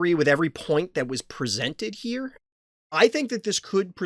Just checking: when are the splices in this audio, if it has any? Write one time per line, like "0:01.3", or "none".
0:02.4